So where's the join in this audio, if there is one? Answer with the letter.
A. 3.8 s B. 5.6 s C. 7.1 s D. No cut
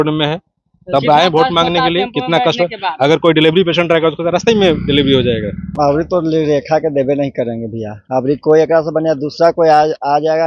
B